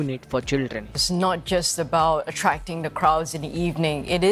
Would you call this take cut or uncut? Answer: uncut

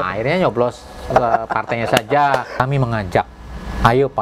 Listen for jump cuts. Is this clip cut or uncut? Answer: cut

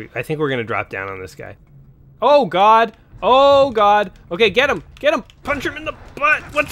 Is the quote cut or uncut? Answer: cut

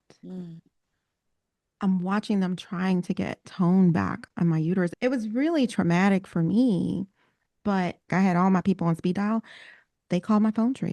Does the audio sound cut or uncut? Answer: cut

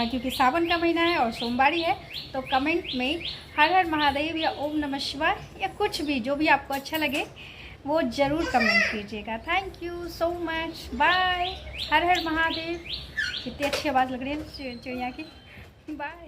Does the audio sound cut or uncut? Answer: uncut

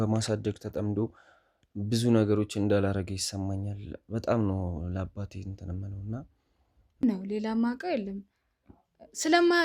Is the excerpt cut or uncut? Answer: cut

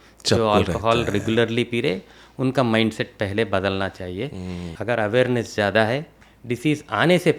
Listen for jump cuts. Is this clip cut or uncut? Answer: cut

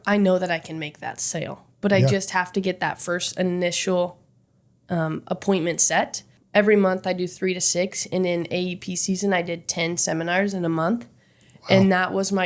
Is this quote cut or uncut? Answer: cut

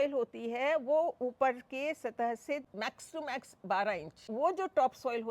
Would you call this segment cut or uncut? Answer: cut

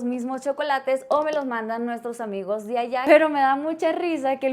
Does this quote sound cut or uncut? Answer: cut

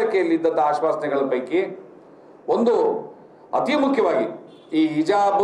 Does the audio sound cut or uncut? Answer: uncut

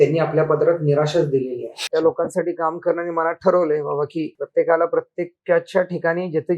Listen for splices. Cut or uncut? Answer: cut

